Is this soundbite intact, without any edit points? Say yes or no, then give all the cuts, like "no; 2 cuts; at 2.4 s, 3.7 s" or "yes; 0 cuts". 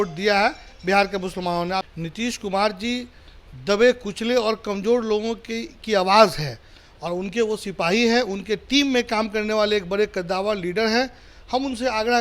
no; 1 cut; at 1.8 s